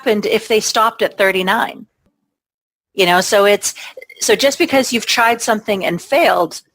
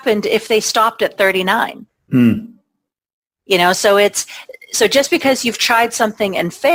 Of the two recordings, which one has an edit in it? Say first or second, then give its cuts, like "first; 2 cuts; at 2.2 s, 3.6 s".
first; 1 cut; at 2.0 s